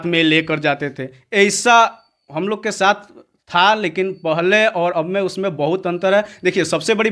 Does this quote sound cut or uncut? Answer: uncut